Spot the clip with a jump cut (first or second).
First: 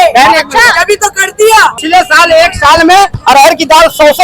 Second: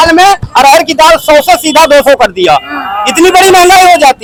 first